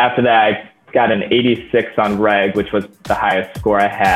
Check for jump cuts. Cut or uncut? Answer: uncut